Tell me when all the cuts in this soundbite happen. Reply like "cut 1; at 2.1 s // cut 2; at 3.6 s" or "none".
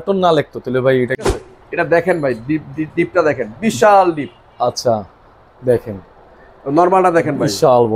cut 1; at 1.3 s